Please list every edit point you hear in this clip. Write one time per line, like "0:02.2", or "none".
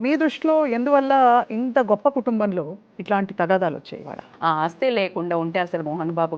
0:04.3